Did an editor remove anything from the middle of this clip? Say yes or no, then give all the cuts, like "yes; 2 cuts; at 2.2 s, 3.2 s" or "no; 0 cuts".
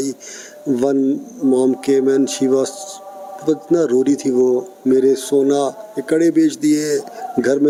no; 0 cuts